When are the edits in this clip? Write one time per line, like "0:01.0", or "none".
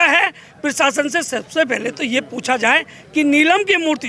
none